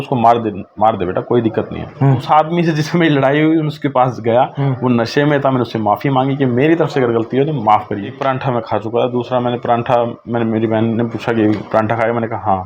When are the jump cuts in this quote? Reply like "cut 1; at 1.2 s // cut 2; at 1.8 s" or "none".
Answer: cut 1; at 2.2 s // cut 2; at 8.2 s